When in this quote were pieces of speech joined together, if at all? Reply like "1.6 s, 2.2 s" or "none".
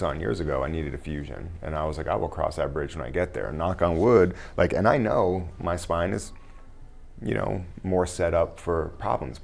none